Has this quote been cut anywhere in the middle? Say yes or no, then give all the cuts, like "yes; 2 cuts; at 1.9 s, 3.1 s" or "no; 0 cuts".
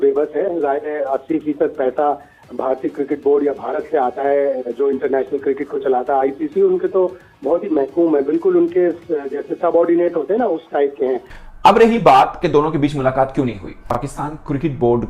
yes; 1 cut; at 11.3 s